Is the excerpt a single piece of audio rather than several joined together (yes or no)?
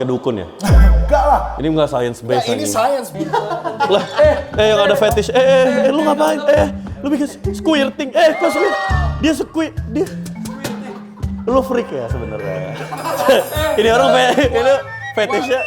no